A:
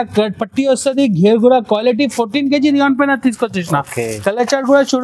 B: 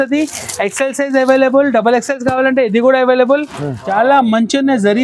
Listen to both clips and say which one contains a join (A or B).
B